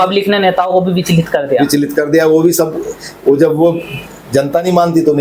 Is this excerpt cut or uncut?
uncut